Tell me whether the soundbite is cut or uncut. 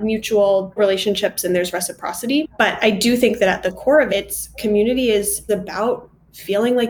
uncut